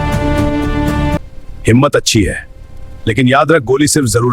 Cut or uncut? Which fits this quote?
cut